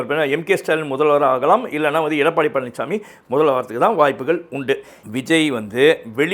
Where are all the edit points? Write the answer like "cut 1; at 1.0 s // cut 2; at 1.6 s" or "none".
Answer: cut 1; at 5.0 s

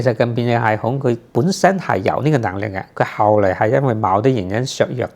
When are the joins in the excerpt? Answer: none

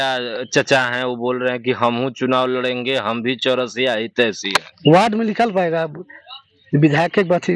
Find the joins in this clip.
cut 1; at 4.7 s

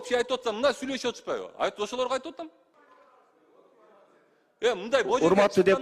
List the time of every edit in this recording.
cut 1; at 2.8 s

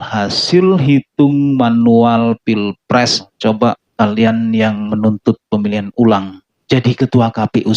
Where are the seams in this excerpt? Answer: cut 1; at 3.3 s

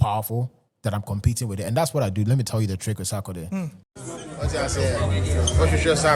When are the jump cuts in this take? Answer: cut 1; at 3.8 s

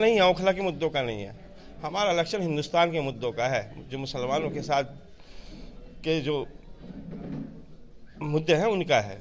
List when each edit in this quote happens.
none

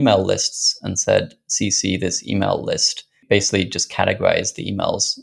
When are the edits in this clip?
cut 1; at 3.2 s

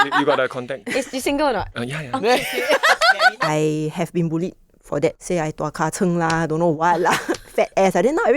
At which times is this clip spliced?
cut 1; at 1.7 s // cut 2; at 3.4 s // cut 3; at 5.2 s

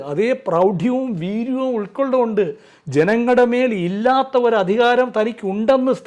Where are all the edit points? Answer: none

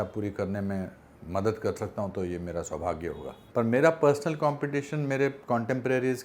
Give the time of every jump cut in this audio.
cut 1; at 3.3 s

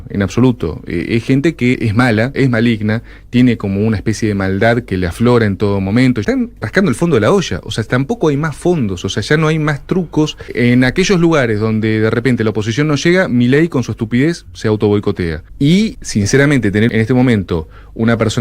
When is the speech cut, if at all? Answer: cut 1; at 2.3 s // cut 2; at 6.7 s // cut 3; at 10.5 s // cut 4; at 15.4 s // cut 5; at 16.0 s // cut 6; at 16.9 s

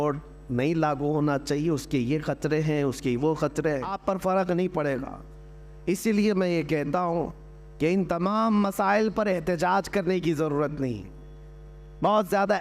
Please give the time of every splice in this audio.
cut 1; at 4.0 s

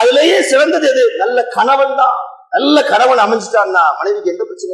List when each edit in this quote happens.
none

